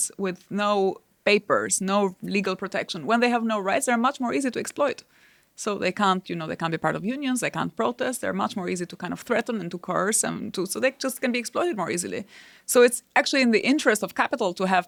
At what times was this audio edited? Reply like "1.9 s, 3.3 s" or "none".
none